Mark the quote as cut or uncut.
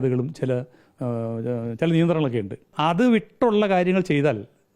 cut